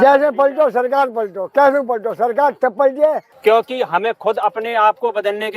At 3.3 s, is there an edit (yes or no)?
yes